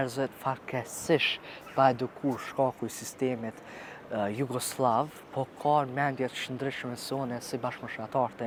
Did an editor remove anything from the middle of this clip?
no; 0 cuts

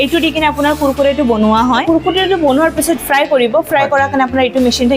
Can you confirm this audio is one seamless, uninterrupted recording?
no; 2 cuts; at 1.8 s, 3.0 s

